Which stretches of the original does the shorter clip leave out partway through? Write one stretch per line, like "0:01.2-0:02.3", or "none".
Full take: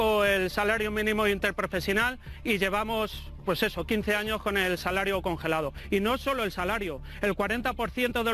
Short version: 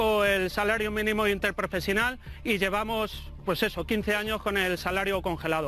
none